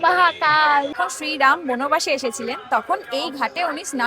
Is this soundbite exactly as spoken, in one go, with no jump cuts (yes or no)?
no